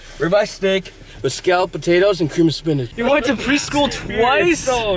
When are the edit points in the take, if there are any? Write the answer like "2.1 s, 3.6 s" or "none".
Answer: 2.9 s